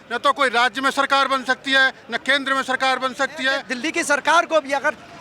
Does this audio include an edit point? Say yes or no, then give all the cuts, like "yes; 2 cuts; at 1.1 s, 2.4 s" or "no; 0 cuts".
yes; 1 cut; at 3.7 s